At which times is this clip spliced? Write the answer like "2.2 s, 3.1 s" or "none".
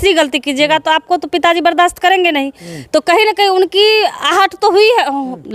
none